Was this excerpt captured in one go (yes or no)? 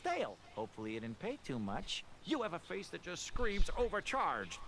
no